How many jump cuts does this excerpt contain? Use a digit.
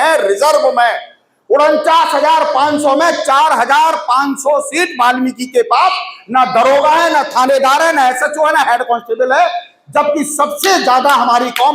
0